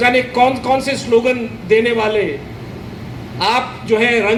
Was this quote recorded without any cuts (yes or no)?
yes